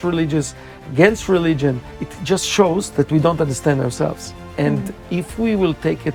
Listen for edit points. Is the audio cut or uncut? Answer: uncut